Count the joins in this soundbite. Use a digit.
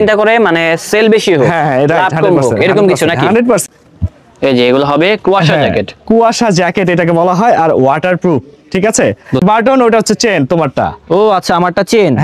2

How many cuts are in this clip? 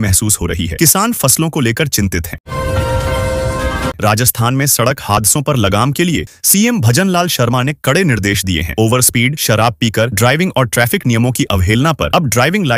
2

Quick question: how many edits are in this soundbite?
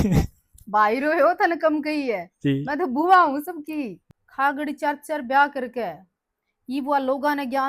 1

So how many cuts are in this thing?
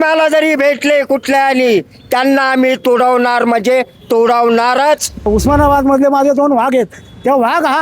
1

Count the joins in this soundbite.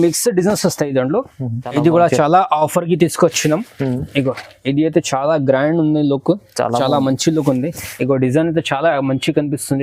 1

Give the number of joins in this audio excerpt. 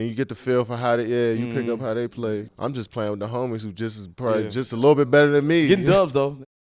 2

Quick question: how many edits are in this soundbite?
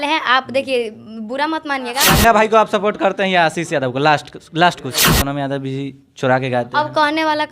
2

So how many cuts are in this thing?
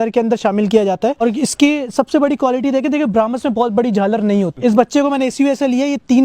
2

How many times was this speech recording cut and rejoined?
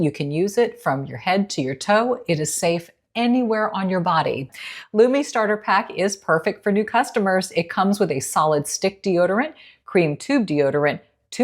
1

